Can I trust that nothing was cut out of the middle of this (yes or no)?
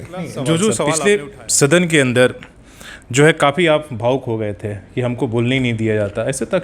no